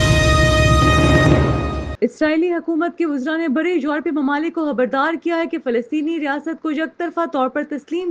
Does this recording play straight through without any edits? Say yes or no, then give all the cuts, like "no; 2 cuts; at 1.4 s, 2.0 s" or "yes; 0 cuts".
no; 1 cut; at 1.9 s